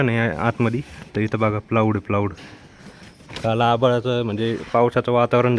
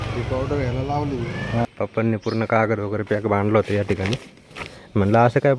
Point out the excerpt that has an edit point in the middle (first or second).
second